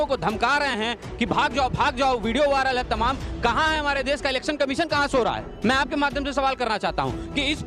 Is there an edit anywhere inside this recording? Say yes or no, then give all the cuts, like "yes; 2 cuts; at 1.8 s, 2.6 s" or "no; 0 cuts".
no; 0 cuts